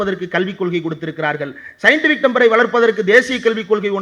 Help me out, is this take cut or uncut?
uncut